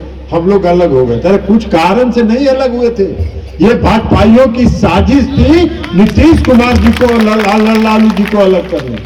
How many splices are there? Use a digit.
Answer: 0